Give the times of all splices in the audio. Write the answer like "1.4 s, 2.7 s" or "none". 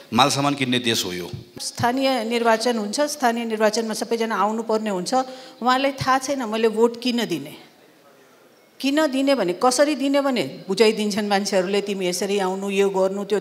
1.5 s